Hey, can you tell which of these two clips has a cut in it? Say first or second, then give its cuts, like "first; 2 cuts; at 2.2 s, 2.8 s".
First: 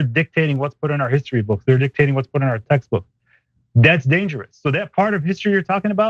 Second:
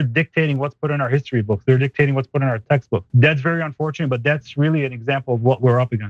second; 1 cut; at 3.1 s